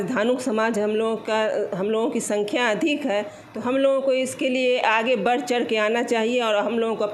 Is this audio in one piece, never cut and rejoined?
yes; 0 cuts

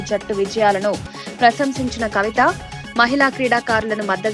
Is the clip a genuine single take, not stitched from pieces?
yes; 0 cuts

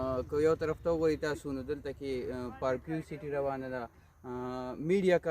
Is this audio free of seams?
yes; 0 cuts

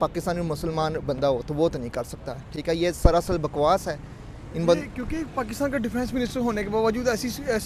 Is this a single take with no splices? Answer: yes; 0 cuts

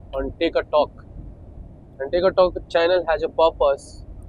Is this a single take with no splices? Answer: yes; 0 cuts

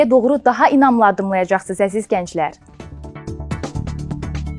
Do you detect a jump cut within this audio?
yes; 1 cut; at 3.1 s

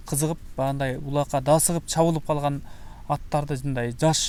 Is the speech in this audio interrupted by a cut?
no; 0 cuts

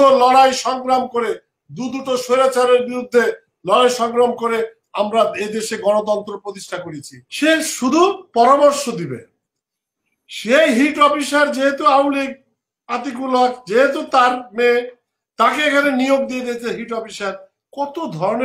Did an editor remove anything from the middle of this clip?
yes; 1 cut; at 7.2 s

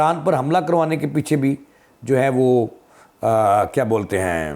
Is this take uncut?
yes; 0 cuts

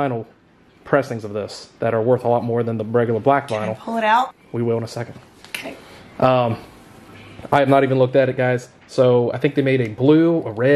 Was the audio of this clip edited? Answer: yes; 1 cut; at 4.3 s

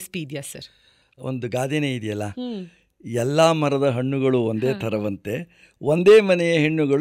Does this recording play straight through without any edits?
yes; 0 cuts

